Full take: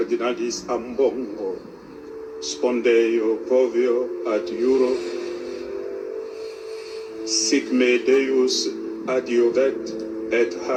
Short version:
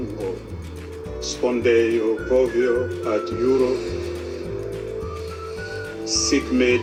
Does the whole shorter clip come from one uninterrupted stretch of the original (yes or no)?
yes